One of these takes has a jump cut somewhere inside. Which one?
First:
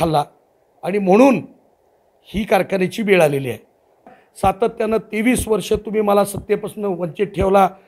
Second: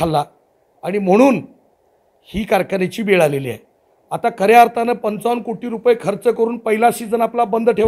first; 1 cut; at 4.1 s

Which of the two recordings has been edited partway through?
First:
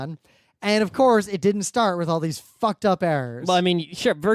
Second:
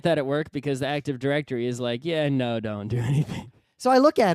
second; 1 cut; at 2.0 s

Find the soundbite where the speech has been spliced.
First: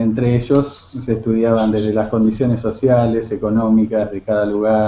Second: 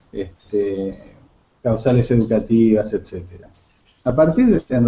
first; 1 cut; at 2.4 s

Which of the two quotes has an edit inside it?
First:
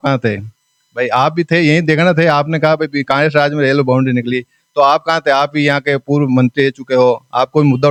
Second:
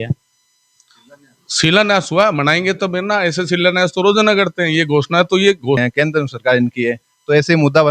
second; 1 cut; at 5.8 s

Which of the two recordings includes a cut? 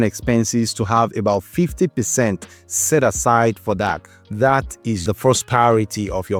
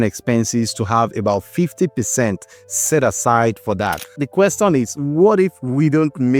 second; 1 cut; at 4.2 s

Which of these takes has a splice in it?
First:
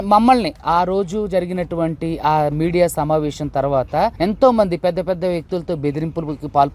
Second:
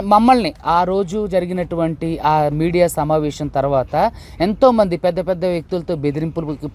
first; 1 cut; at 4.1 s

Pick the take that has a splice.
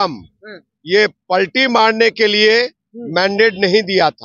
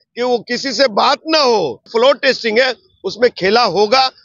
second; 1 cut; at 1.8 s

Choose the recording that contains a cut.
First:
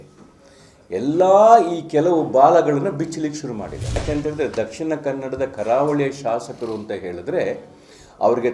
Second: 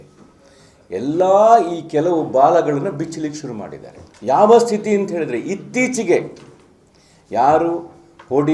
first; 1 cut; at 4.0 s

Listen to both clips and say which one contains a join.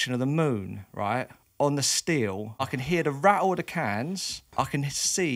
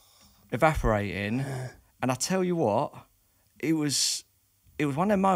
first; 2 cuts; at 2.6 s, 4.4 s

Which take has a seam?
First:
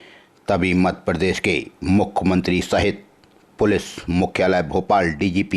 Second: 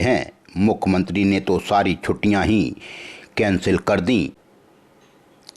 second; 1 cut; at 4.4 s

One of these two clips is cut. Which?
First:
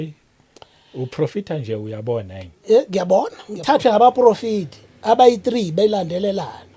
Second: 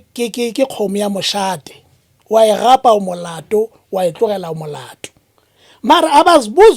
first; 1 cut; at 3.5 s

